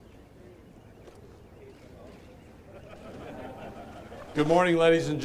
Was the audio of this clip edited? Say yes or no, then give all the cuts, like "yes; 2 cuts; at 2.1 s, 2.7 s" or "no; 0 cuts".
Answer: no; 0 cuts